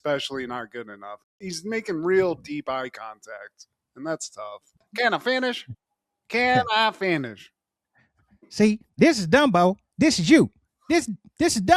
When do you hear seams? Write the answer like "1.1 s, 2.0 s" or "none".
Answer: 4.8 s